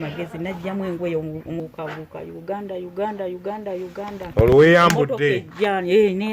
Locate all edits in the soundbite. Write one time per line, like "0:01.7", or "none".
0:01.6